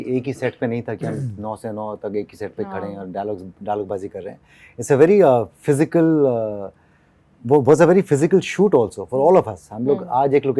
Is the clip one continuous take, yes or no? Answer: yes